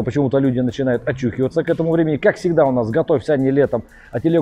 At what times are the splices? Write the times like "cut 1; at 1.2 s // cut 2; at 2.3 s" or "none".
none